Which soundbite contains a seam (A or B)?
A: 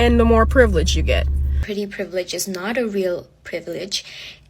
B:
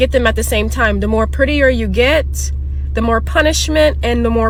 A